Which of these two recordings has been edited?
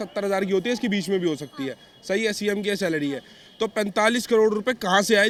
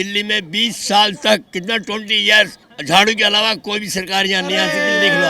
second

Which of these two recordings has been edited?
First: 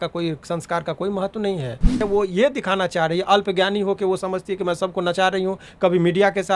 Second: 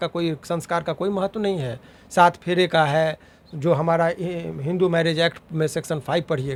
first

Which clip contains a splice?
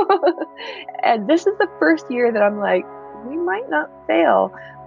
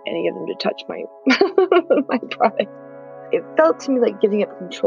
second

